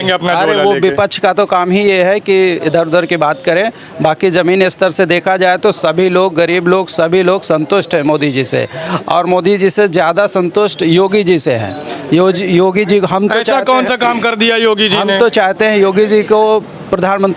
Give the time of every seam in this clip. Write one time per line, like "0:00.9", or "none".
none